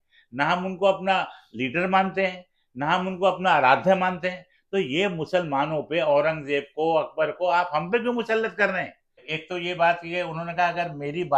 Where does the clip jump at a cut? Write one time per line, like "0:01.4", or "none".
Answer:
0:09.3